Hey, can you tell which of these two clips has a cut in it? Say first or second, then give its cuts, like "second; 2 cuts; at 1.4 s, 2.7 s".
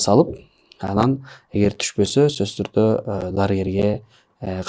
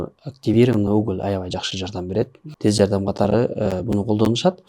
second; 1 cut; at 2.4 s